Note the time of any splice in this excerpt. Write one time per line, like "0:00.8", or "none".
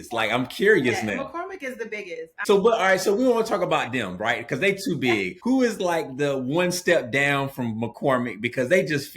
0:02.3
0:05.3

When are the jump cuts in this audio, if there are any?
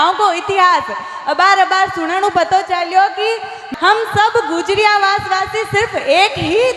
0:03.6

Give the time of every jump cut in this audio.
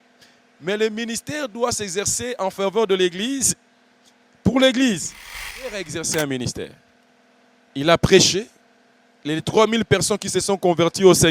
0:05.7

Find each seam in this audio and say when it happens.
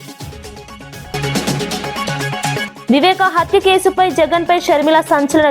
0:01.0

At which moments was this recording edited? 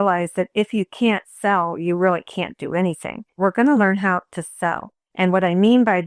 0:03.4

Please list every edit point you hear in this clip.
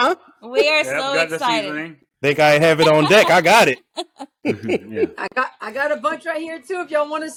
none

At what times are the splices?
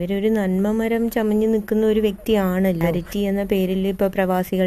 0:03.0

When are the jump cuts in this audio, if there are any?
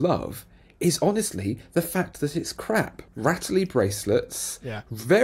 0:03.0

